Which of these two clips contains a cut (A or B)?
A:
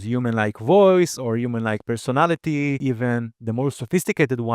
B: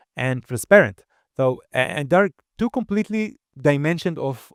A